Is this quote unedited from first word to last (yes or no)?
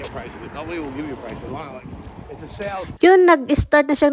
yes